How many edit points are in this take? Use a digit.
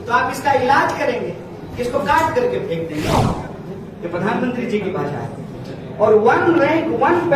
1